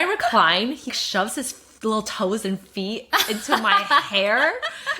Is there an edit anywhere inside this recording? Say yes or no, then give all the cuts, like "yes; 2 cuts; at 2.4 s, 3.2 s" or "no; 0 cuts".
yes; 1 cut; at 0.9 s